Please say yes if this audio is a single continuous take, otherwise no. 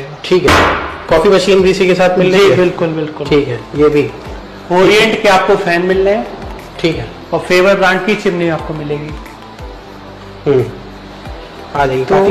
yes